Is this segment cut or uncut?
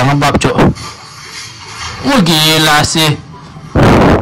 uncut